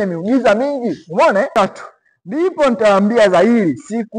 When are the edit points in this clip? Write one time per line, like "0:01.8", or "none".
0:01.5